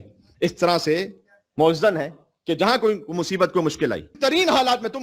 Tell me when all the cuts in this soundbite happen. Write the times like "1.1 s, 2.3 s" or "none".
4.1 s